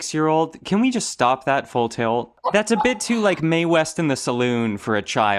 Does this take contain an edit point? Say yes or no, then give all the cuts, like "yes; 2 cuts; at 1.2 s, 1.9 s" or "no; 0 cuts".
no; 0 cuts